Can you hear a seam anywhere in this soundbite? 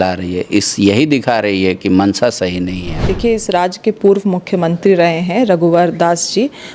yes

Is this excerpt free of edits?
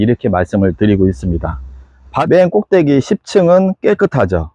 no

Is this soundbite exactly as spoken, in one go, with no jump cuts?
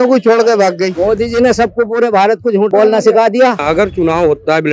no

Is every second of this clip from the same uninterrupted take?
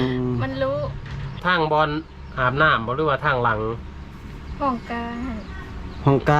no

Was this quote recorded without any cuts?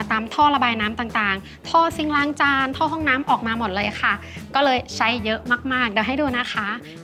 yes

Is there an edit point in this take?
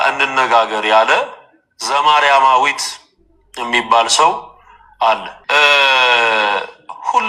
yes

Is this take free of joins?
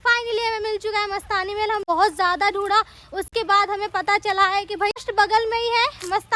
no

